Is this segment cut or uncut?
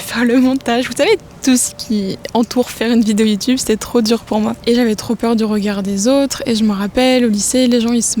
uncut